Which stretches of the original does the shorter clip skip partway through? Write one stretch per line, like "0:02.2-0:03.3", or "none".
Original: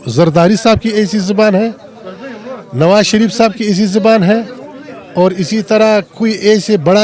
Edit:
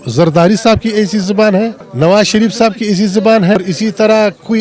0:01.8-0:02.6
0:04.4-0:05.3